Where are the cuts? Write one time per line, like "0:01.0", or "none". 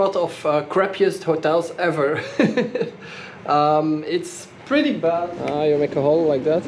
0:05.4